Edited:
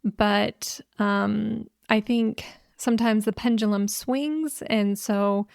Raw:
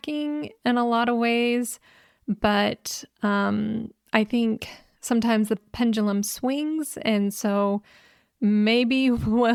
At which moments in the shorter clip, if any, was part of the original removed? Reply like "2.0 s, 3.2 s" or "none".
3.4 s